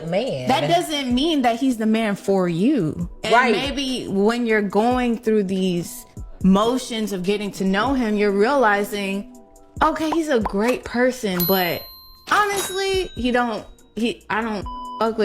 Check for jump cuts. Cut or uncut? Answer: cut